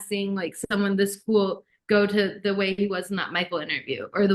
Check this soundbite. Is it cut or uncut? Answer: uncut